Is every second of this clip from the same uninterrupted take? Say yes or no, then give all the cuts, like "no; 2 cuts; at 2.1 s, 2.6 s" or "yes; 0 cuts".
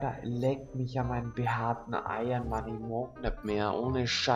yes; 0 cuts